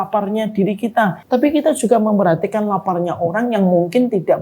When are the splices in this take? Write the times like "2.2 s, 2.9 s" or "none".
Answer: 1.2 s